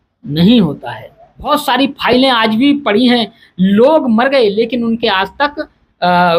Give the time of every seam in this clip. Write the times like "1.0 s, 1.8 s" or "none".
1.5 s